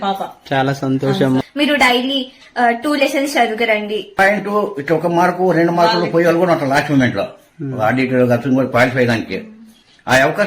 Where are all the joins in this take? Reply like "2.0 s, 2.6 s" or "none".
1.4 s, 4.2 s